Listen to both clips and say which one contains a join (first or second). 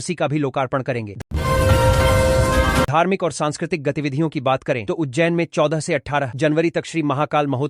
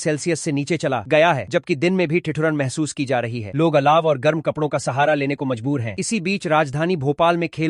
first